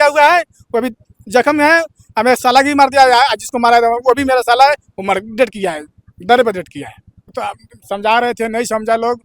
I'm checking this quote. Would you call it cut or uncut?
cut